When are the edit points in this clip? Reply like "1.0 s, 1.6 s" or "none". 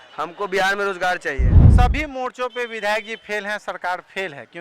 1.6 s